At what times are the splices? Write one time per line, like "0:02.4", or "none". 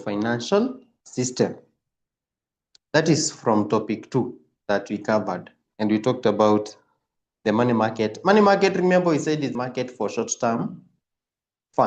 0:09.5

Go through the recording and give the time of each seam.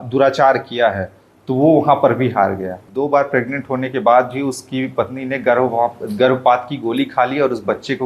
0:02.8

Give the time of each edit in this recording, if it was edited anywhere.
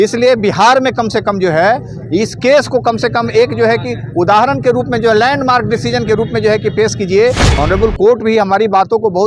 0:07.5

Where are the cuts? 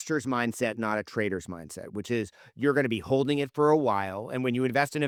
none

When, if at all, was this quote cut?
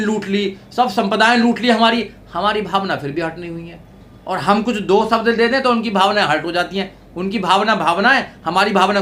none

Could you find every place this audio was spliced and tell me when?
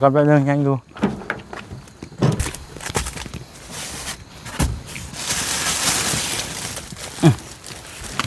0:02.4

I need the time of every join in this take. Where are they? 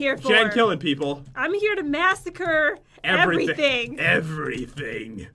0:02.0

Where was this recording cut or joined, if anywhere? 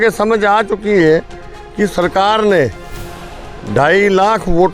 none

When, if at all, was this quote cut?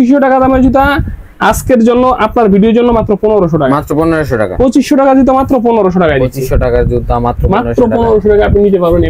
none

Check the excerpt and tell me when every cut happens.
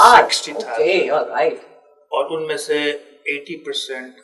none

